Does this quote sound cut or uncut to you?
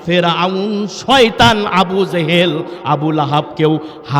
uncut